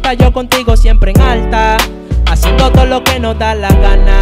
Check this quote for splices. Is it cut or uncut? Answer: uncut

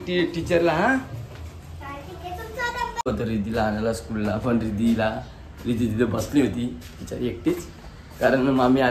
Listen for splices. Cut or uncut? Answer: cut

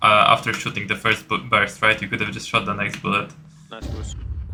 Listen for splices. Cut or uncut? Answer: uncut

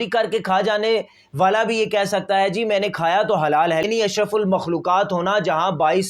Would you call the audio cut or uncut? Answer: cut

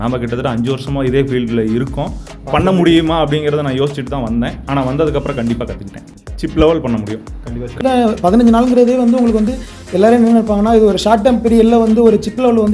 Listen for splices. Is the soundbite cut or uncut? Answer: cut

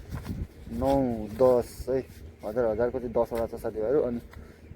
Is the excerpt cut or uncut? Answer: uncut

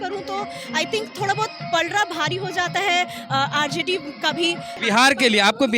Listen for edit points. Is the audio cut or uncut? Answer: cut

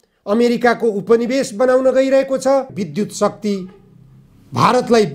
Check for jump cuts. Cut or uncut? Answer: cut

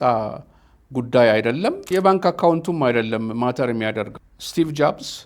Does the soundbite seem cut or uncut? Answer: cut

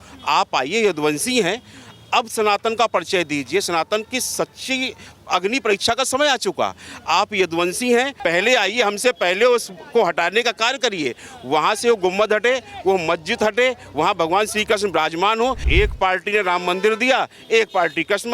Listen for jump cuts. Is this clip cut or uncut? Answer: cut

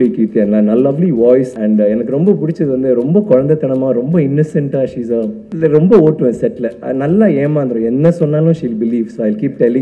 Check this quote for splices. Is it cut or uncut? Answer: cut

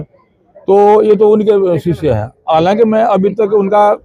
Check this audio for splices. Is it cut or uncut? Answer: uncut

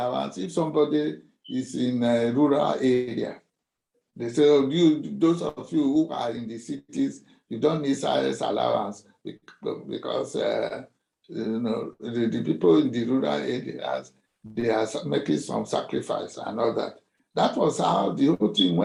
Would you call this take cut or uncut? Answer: uncut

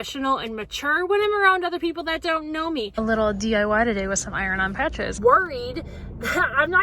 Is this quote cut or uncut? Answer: cut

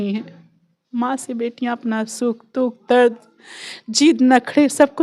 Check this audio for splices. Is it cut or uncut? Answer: uncut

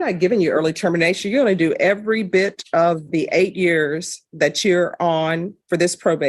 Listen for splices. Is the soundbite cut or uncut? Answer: uncut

